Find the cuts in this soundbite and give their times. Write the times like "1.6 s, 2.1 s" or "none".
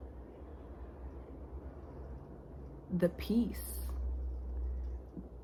none